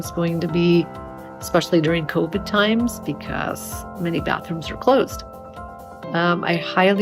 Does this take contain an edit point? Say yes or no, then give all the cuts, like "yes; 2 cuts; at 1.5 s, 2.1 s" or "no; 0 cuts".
no; 0 cuts